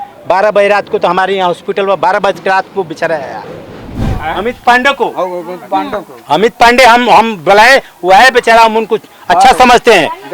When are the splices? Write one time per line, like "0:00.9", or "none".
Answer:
0:04.1